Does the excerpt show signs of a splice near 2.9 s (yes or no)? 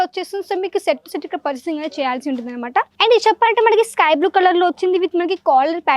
yes